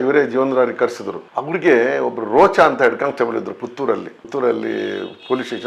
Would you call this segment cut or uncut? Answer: uncut